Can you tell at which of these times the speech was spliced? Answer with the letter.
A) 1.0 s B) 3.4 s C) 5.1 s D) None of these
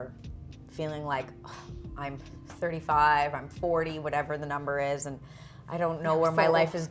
D